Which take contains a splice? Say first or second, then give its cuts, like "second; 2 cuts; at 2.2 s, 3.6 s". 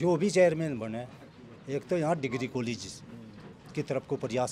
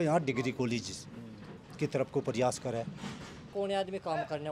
second; 1 cut; at 3.5 s